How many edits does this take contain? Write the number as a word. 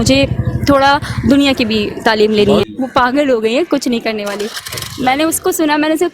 one